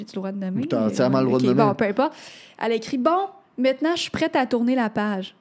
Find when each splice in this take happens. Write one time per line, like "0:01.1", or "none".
none